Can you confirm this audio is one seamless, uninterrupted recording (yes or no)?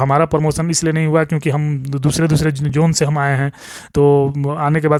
yes